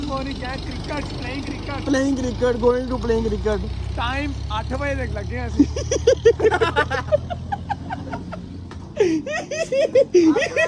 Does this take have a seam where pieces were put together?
no; 0 cuts

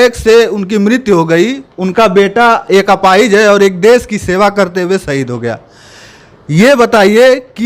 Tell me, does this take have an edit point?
no; 0 cuts

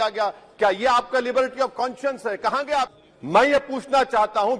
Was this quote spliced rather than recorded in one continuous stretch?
yes; 1 cut; at 3.0 s

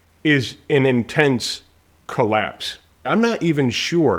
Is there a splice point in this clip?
yes; 1 cut; at 3.0 s

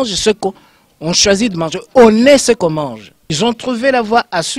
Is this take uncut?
no; 1 cut; at 3.3 s

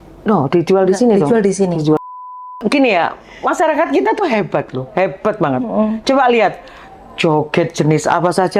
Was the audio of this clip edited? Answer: yes; 1 cut; at 2.3 s

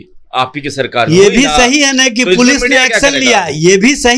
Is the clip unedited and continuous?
yes; 0 cuts

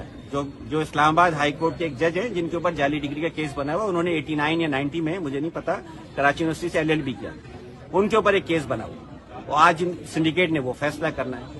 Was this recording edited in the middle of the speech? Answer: no; 0 cuts

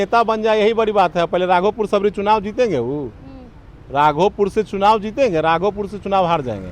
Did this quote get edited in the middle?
no; 0 cuts

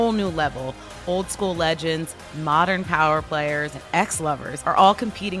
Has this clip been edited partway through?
yes; 2 cuts; at 3.8 s, 4.5 s

